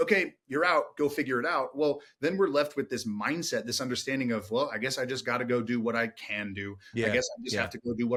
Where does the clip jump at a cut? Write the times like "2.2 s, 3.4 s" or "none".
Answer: none